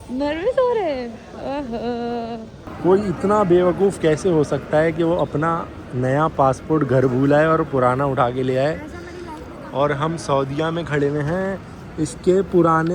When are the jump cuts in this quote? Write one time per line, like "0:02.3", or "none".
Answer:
0:02.7